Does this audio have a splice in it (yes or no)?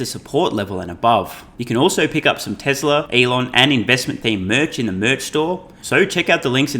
yes